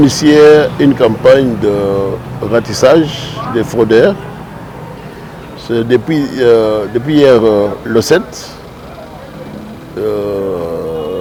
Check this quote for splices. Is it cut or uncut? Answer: uncut